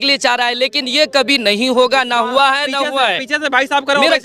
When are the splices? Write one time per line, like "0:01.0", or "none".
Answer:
none

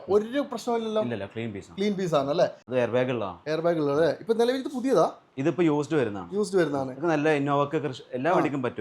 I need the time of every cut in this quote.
0:02.6

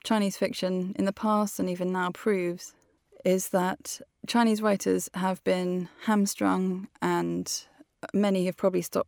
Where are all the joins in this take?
none

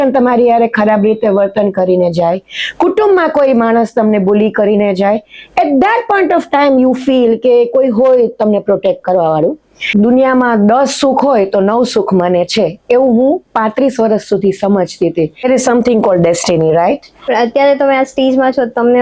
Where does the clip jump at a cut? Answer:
0:09.8
0:15.4
0:17.1

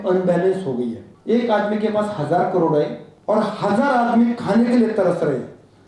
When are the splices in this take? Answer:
0:01.1
0:03.1

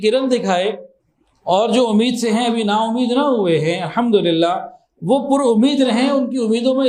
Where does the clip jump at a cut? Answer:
none

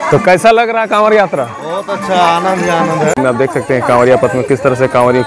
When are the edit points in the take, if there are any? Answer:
0:03.2

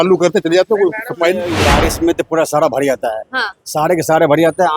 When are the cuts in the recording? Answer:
0:01.6

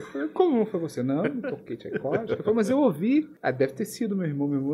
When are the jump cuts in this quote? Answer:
0:03.3

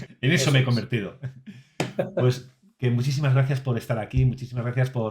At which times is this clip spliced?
none

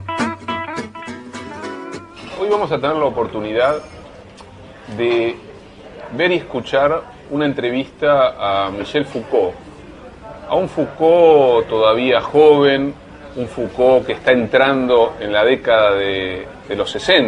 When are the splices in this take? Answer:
0:14.9

